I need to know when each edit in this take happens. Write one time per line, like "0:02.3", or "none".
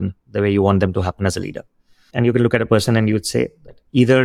0:02.0